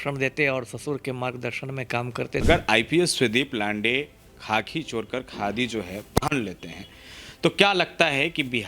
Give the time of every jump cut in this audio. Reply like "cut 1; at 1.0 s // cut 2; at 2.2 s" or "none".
cut 1; at 2.4 s